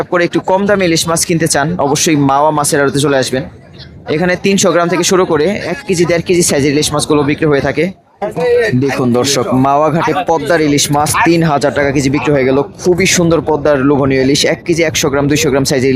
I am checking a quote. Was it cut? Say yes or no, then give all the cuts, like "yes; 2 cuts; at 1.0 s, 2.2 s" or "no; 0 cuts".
yes; 1 cut; at 8.2 s